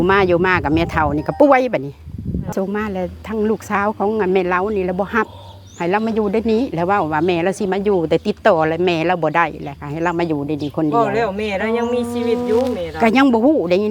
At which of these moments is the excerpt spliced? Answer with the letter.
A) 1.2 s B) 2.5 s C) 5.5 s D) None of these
B